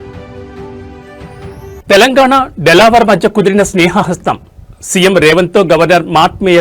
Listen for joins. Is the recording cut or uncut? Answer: uncut